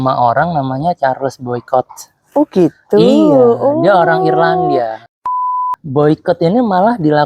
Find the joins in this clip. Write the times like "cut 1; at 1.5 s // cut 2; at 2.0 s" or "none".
cut 1; at 5.2 s